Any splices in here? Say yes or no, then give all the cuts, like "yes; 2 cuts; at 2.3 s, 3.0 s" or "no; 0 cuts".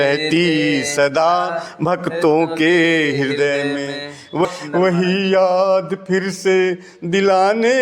yes; 1 cut; at 4.5 s